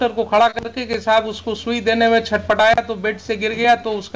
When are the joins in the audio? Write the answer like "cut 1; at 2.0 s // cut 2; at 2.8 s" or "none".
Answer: none